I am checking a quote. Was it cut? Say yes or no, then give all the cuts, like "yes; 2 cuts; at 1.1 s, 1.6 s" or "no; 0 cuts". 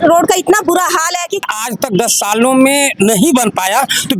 yes; 1 cut; at 1.4 s